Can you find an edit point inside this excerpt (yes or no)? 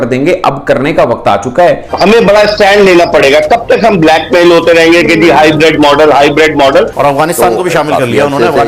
yes